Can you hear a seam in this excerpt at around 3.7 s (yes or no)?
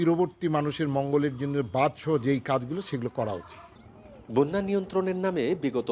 no